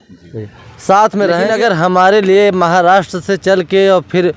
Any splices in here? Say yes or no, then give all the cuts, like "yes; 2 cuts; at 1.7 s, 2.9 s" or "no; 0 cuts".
yes; 1 cut; at 1.5 s